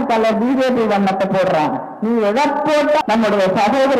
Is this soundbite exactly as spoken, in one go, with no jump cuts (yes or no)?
no